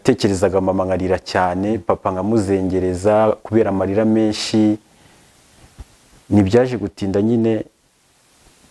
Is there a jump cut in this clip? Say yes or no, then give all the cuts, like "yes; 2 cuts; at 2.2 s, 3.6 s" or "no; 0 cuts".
no; 0 cuts